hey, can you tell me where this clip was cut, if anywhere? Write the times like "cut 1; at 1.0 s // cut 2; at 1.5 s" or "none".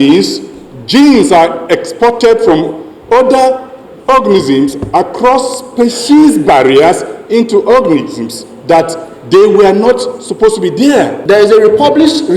cut 1; at 11.2 s